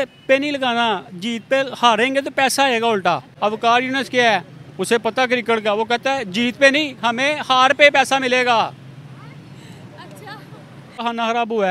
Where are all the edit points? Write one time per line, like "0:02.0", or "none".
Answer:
0:03.3
0:11.0